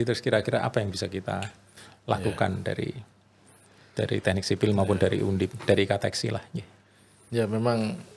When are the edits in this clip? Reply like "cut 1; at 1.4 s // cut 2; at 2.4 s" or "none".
none